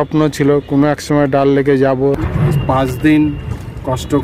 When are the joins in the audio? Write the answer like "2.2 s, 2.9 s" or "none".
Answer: 2.2 s

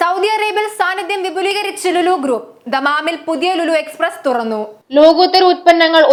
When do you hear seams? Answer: none

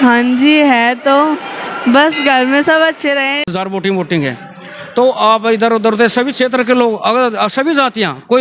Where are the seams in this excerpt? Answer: 3.5 s

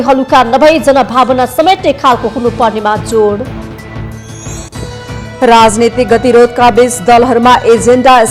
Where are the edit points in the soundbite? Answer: none

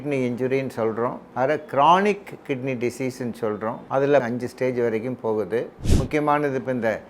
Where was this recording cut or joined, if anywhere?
1.2 s, 4.1 s, 5.8 s

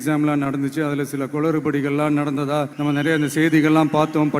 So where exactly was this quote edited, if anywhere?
2.7 s

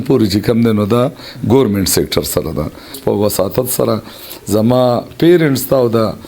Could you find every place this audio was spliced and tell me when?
3.0 s

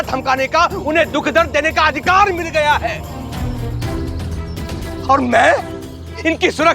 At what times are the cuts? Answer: 3.3 s

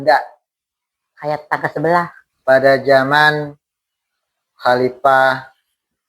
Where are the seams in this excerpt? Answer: 2.2 s

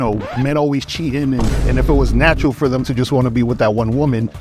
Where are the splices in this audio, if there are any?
none

